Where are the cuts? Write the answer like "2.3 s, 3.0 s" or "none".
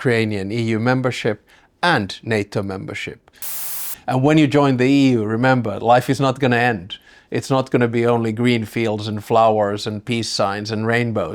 3.6 s